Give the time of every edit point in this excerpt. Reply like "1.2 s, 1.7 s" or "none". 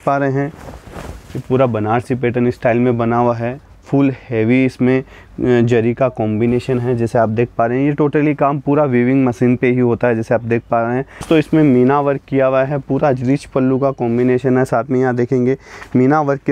11.3 s